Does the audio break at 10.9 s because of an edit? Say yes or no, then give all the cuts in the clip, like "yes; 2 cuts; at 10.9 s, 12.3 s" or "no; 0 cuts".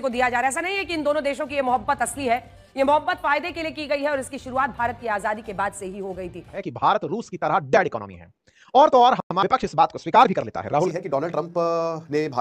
yes; 2 cuts; at 6.6 s, 10.9 s